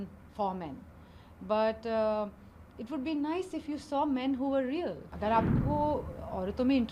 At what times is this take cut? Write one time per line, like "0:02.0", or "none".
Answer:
0:05.1